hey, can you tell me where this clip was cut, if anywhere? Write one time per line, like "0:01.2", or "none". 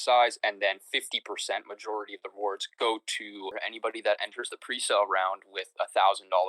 0:03.5